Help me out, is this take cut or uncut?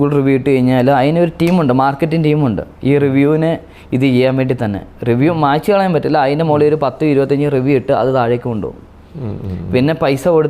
uncut